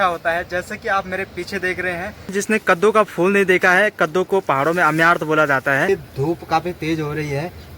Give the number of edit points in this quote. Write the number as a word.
two